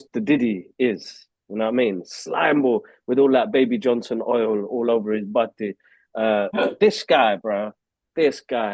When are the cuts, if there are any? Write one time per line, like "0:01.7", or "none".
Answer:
none